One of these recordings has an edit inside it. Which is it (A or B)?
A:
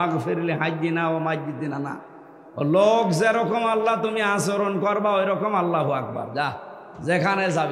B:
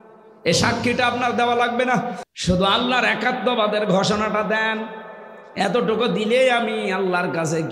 B